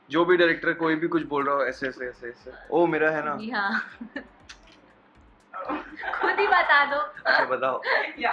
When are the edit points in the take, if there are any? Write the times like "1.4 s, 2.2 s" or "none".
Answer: 2.6 s